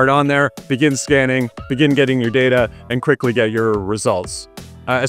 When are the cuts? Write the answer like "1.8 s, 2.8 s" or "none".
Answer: none